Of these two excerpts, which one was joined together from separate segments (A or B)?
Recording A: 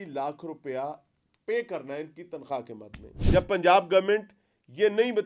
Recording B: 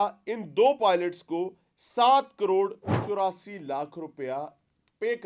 A